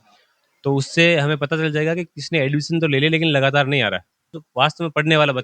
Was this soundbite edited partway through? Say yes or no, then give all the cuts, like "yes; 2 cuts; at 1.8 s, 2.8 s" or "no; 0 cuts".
yes; 1 cut; at 4.4 s